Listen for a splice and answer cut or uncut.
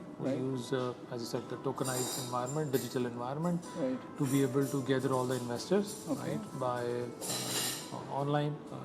uncut